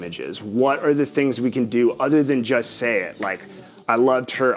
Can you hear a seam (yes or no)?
no